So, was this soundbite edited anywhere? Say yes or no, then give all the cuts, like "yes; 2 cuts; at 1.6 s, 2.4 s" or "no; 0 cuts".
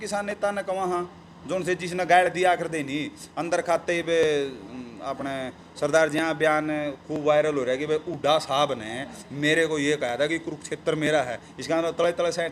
no; 0 cuts